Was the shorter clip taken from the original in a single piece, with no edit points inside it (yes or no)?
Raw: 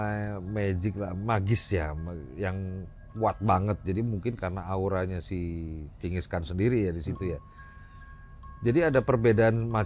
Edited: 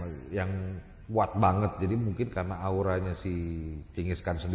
yes